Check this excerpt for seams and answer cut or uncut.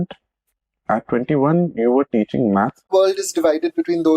cut